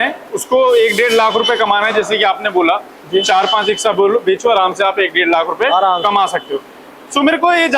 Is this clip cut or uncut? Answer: uncut